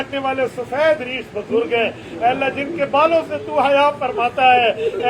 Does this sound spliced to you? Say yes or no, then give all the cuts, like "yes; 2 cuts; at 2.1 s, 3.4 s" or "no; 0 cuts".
no; 0 cuts